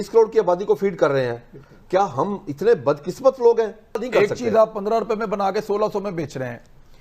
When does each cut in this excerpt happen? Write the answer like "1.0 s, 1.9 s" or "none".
4.0 s